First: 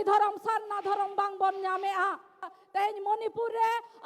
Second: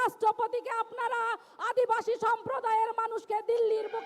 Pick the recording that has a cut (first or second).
first